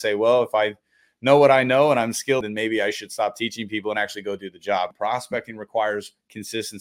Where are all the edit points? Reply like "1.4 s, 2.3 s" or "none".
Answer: 2.4 s, 4.9 s

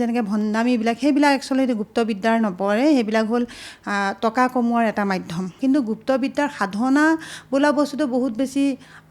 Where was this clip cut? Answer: none

